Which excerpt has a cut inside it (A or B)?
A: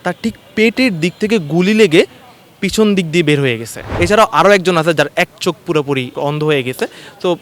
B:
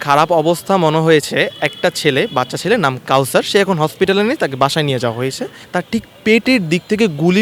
A